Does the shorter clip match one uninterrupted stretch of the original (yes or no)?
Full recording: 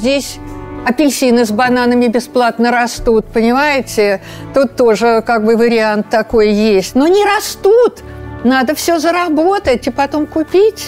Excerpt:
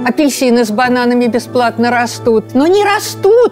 no